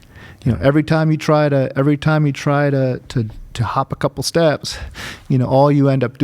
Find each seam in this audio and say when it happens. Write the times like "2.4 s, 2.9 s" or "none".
none